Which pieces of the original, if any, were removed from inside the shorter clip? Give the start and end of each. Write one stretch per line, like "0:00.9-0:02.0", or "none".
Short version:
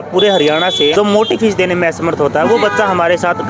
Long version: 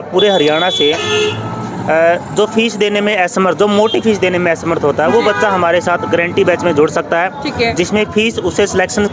0:00.9-0:03.6